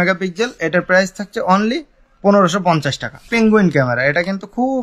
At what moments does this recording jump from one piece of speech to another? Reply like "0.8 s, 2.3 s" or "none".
3.1 s